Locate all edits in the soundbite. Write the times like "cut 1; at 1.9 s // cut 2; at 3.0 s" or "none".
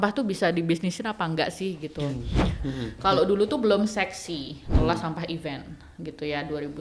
cut 1; at 2.6 s